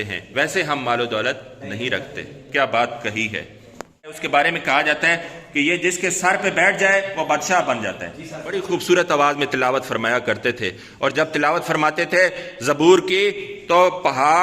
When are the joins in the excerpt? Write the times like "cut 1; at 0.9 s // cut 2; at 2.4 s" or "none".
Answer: cut 1; at 4.2 s // cut 2; at 8.6 s